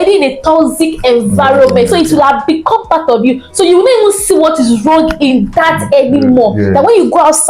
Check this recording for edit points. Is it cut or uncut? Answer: uncut